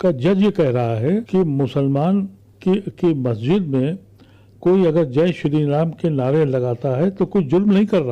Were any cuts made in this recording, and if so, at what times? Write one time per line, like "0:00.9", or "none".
0:01.3
0:02.4